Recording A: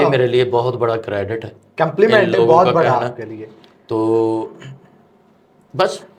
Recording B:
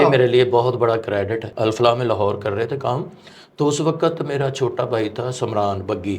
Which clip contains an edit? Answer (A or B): B